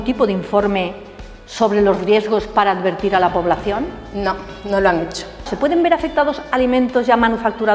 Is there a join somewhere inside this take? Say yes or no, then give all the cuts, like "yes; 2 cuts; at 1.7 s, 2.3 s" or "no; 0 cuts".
yes; 1 cut; at 5.5 s